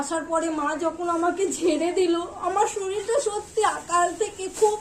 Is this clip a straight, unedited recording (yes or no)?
yes